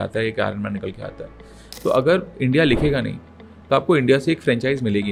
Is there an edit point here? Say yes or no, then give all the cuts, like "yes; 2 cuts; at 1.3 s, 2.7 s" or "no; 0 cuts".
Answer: no; 0 cuts